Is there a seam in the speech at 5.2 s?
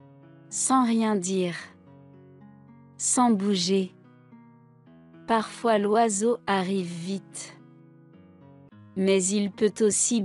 no; 2 cuts; at 7.2 s, 8.9 s

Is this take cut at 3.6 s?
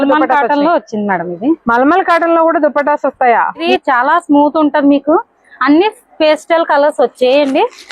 yes; 1 cut; at 3.6 s

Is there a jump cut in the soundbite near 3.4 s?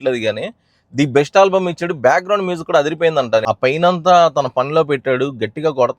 yes; 1 cut; at 3.4 s

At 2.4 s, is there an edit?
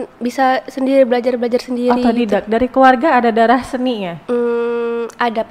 no; 0 cuts

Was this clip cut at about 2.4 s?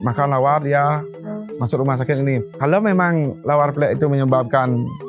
yes; 1 cut; at 2.4 s

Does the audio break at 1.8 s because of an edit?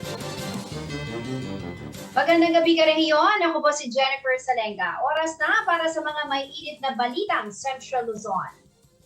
yes; 1 cut; at 1.8 s

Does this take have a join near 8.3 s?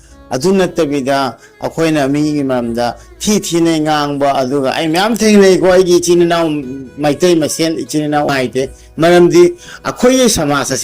yes; 1 cut; at 8.3 s

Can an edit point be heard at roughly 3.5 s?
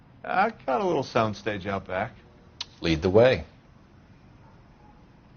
yes; 1 cut; at 3.5 s

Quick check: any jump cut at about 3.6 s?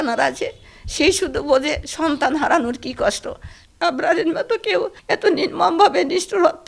yes; 1 cut; at 3.6 s

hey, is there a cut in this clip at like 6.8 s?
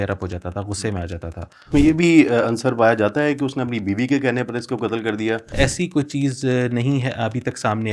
no; 2 cuts; at 1.7 s, 5.5 s

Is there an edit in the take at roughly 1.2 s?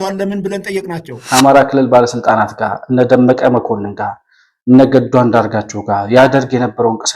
yes; 1 cut; at 1.2 s

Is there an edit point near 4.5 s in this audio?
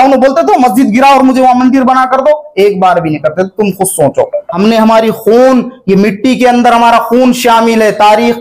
yes; 1 cut; at 4.5 s

